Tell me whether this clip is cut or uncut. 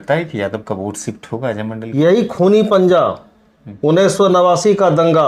cut